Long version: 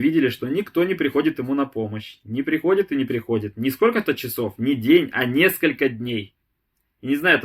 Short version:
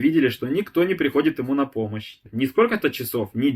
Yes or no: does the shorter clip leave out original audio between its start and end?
yes